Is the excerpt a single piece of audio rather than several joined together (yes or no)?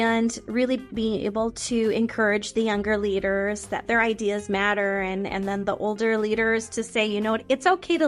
yes